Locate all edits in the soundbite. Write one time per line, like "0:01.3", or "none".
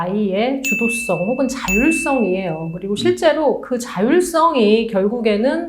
none